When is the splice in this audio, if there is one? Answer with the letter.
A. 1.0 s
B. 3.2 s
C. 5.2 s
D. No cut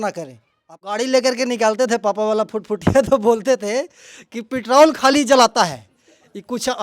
A